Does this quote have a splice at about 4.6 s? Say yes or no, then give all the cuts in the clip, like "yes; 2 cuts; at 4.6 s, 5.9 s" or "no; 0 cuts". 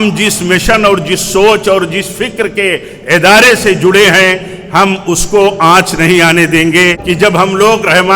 no; 1 cut; at 7.0 s